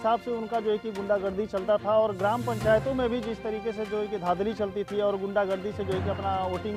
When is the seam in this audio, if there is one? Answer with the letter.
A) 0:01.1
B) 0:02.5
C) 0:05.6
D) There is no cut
D